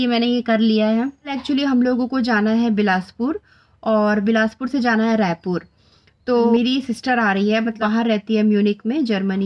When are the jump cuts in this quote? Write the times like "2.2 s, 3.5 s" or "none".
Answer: 1.4 s, 6.5 s, 7.8 s